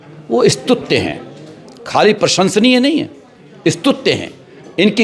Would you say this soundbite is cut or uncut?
uncut